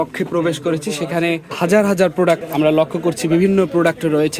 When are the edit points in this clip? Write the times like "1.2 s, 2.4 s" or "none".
1.5 s, 2.5 s

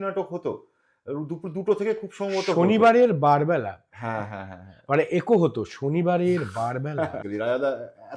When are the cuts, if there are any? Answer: 7.2 s

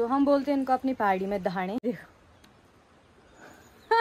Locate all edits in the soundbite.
1.8 s

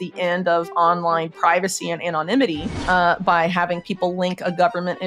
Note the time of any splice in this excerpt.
2.7 s

